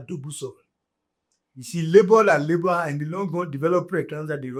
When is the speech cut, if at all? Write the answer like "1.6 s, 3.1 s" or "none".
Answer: none